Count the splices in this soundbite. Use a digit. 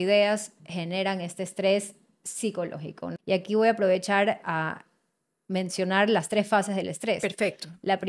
1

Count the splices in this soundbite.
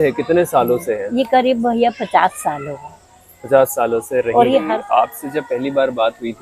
1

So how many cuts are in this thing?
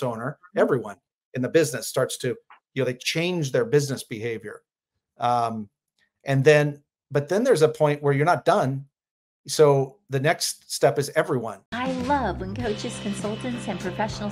1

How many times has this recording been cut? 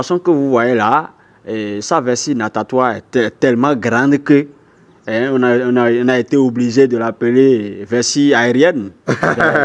0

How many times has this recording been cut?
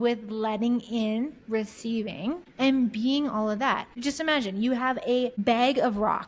3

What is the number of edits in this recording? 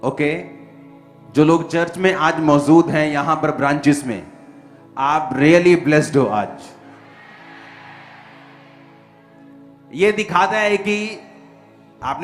0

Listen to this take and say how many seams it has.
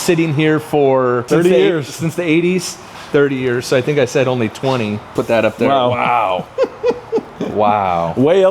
2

